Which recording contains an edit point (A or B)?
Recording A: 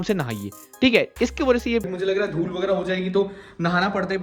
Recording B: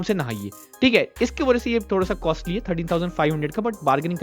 A